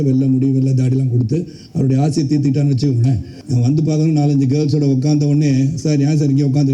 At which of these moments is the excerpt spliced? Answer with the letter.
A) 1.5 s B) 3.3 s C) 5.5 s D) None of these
B